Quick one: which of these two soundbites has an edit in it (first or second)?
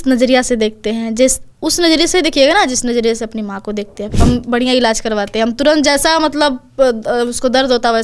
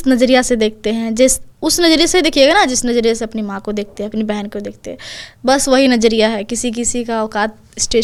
first